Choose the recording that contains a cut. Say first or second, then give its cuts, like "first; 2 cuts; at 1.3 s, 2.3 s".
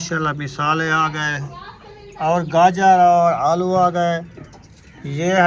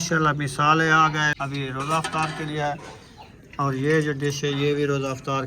second; 1 cut; at 1.4 s